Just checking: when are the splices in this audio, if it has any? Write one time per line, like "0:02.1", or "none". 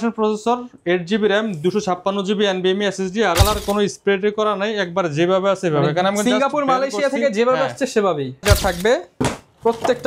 0:03.4
0:08.4

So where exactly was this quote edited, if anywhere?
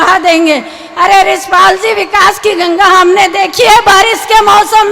none

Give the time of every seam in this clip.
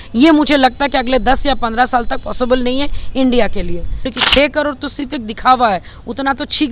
0:04.1

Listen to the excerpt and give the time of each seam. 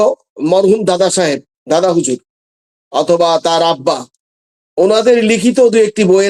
none

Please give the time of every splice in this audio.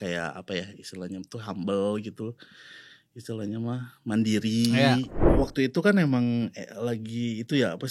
0:05.3

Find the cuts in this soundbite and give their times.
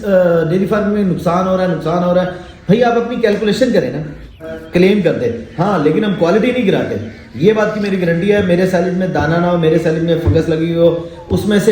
0:04.5

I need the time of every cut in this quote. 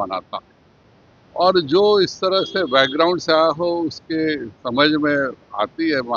none

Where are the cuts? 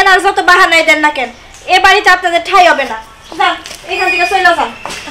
none

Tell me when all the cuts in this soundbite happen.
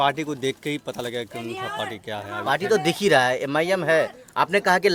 none

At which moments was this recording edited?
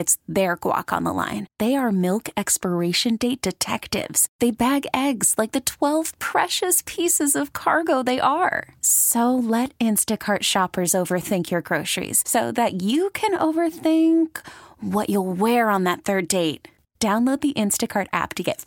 none

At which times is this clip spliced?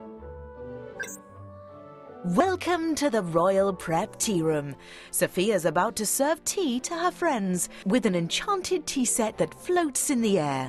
0:02.4

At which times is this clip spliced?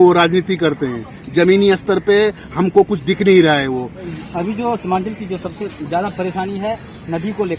0:04.1

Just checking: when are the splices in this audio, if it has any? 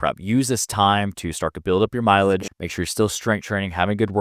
0:02.5

